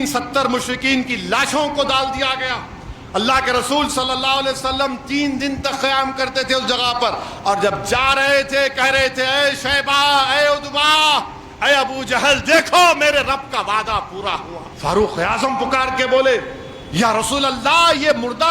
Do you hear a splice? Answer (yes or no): yes